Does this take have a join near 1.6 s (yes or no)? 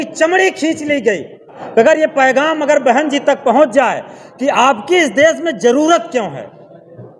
yes